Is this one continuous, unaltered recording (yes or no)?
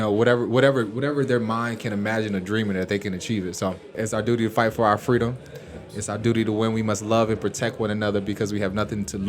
no